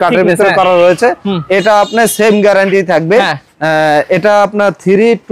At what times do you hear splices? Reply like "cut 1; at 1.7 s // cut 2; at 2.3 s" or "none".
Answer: none

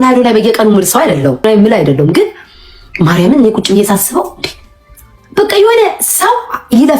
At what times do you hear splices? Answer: cut 1; at 1.4 s

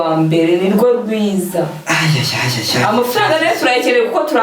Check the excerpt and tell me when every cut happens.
none

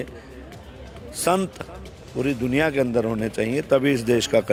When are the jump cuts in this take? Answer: none

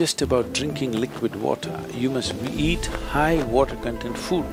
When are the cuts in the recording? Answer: none

